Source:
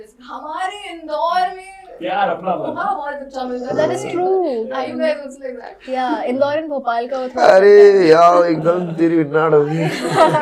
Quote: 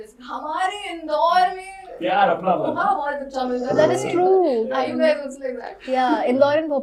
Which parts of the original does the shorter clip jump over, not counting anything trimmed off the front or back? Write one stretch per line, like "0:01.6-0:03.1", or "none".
none